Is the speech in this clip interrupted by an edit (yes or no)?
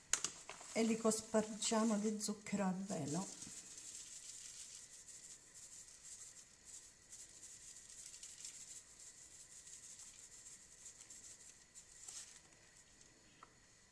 no